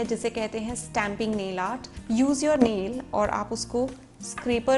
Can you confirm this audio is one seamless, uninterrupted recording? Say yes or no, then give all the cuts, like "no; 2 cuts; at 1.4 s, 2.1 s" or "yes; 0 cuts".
no; 1 cut; at 1.9 s